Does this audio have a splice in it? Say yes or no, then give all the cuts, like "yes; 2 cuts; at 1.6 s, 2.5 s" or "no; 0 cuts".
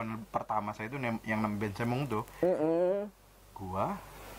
no; 0 cuts